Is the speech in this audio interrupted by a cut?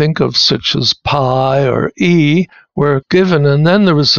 yes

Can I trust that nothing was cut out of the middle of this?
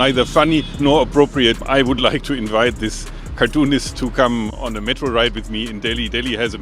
no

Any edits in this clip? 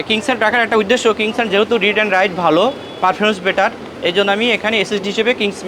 no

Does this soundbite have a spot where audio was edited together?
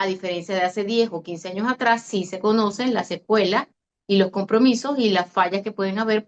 no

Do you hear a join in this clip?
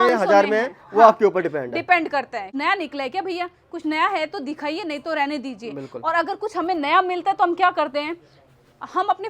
yes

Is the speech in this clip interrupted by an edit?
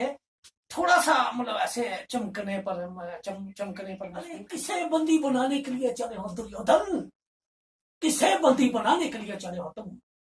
yes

